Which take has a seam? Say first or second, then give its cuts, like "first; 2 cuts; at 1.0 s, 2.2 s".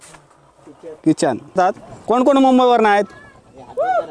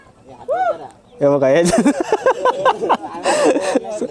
first; 1 cut; at 1.6 s